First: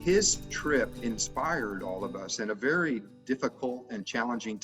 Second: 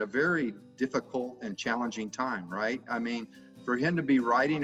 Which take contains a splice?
first; 1 cut; at 1.0 s

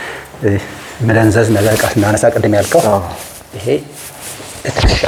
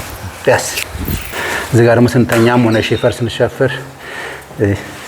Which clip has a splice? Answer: second; 1 cut; at 1.3 s

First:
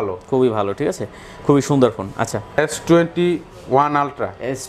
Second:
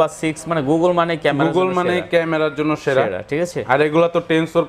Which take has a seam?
first; 1 cut; at 2.6 s

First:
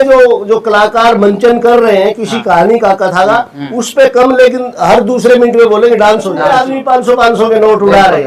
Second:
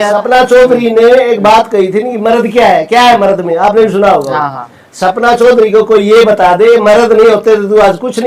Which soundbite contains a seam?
first; 1 cut; at 6.5 s

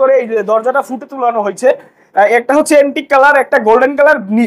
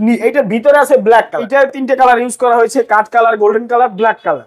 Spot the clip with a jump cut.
second; 1 cut; at 1.4 s

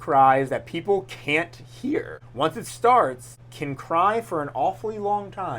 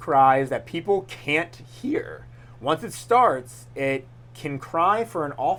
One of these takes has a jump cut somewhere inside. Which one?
first; 2 cuts; at 2.2 s, 3.3 s

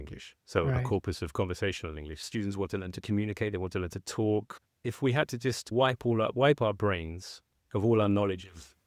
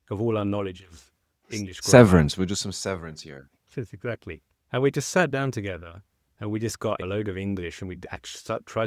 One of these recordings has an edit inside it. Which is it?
first; 2 cuts; at 2.2 s, 4.8 s

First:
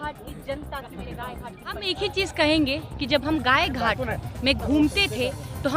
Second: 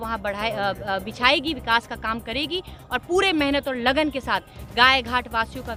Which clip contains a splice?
first; 1 cut; at 1.9 s

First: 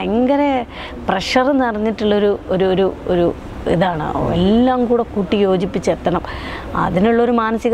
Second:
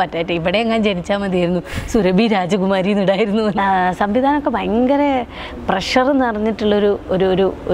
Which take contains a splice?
second; 1 cut; at 3.6 s

